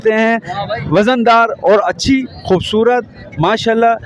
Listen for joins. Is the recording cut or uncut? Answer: uncut